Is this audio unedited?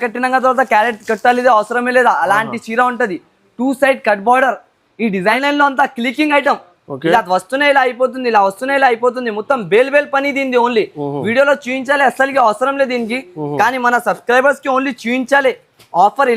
no; 1 cut; at 5.4 s

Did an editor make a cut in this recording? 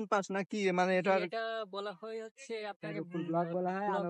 no; 0 cuts

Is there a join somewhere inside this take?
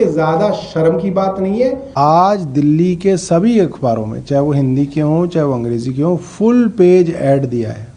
yes; 1 cut; at 1.9 s

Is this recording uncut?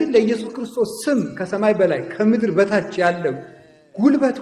yes; 0 cuts

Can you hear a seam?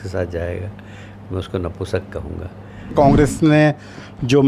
yes; 1 cut; at 2.9 s

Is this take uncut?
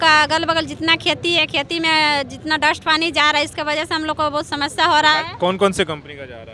yes; 0 cuts

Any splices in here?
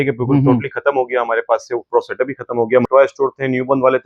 yes; 1 cut; at 2.8 s

